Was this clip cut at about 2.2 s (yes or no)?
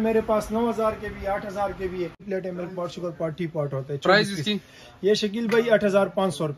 yes